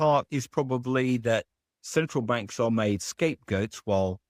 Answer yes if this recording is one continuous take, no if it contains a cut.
yes